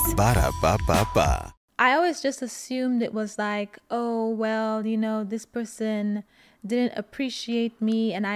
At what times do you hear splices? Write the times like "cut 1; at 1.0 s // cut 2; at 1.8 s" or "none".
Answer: cut 1; at 1.6 s